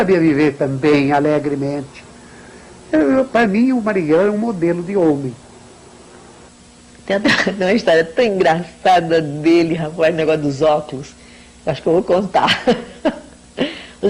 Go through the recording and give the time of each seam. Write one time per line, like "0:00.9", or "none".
none